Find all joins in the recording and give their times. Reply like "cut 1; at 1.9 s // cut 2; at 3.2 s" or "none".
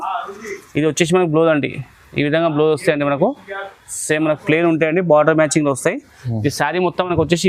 none